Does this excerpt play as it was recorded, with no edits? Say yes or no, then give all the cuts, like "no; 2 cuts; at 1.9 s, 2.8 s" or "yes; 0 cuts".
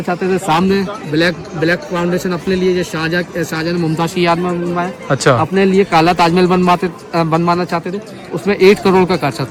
yes; 0 cuts